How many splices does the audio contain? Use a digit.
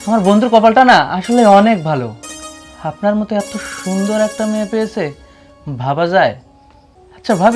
0